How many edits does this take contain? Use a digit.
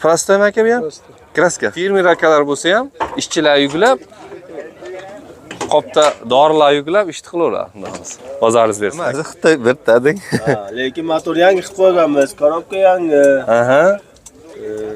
2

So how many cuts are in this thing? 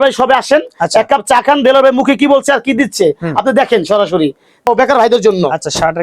1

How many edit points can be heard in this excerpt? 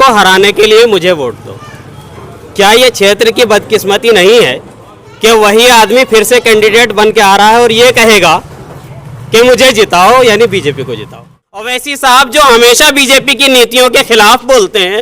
1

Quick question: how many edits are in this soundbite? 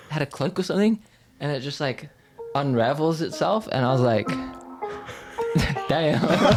0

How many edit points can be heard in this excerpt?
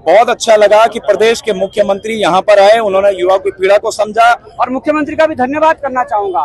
1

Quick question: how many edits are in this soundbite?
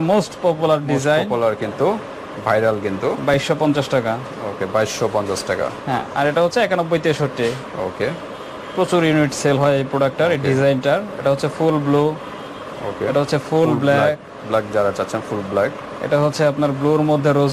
0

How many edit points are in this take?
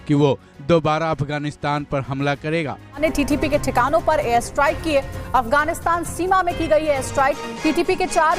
1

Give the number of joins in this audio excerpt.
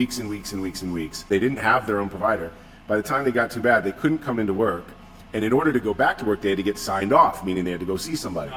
0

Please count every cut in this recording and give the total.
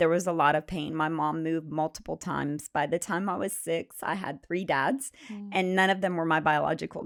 0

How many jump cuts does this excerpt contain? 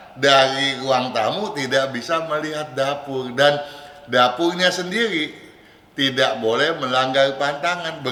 0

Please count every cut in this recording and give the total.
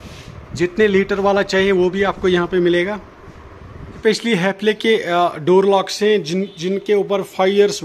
1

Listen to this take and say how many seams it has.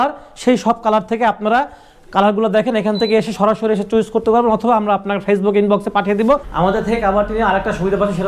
1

